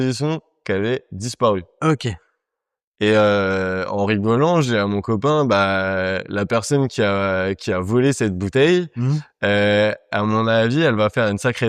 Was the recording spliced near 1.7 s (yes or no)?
no